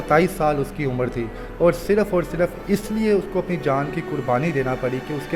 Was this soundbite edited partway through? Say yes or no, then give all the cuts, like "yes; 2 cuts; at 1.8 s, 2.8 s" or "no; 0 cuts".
no; 0 cuts